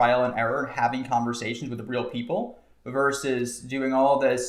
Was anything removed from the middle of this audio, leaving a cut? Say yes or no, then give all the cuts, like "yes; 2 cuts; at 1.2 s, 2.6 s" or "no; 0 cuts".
no; 0 cuts